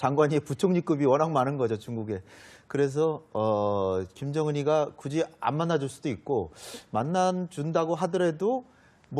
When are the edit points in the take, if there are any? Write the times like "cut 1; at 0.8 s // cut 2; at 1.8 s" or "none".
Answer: cut 1; at 8.1 s